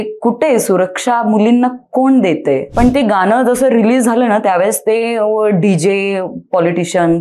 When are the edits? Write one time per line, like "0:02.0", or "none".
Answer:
0:02.7